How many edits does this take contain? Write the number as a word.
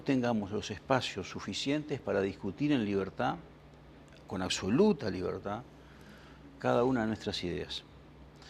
one